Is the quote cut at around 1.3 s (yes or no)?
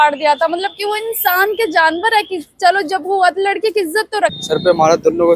no